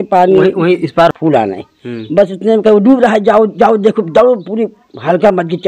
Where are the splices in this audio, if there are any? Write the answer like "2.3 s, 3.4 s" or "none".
1.1 s